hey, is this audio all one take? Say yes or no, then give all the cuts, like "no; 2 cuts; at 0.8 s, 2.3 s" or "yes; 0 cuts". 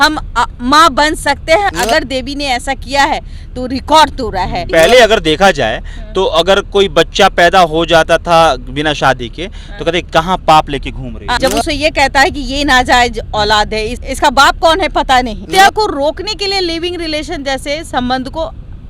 no; 4 cuts; at 1.7 s, 4.7 s, 11.4 s, 15.5 s